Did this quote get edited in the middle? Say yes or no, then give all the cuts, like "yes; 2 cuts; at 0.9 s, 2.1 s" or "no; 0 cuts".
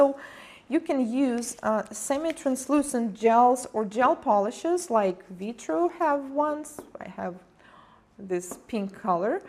yes; 1 cut; at 5.6 s